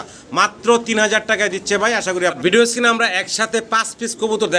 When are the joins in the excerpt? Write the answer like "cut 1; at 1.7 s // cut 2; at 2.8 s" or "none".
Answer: cut 1; at 2.4 s